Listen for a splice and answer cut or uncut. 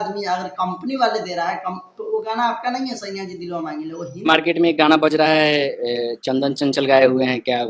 cut